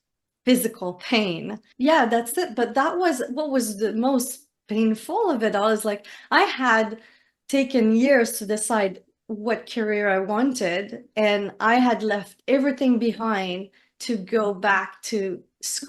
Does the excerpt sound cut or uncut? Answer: cut